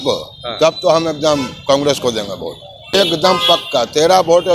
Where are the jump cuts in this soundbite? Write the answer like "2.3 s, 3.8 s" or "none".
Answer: 2.9 s